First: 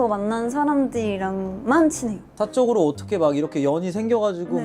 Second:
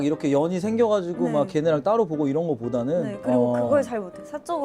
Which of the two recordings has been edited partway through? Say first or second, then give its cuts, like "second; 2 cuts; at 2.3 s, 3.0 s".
first; 1 cut; at 2.4 s